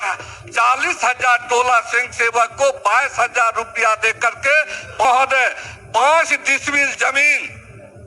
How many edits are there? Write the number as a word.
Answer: one